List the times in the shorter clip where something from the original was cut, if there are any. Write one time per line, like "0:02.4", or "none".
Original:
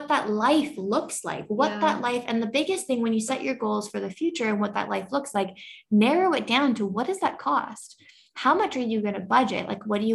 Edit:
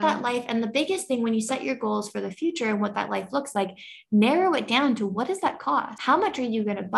0:05.9